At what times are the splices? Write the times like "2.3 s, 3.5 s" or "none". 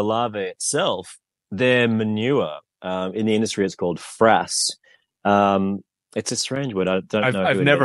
none